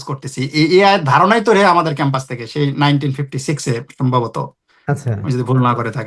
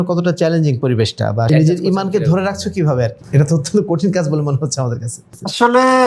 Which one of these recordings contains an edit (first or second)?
second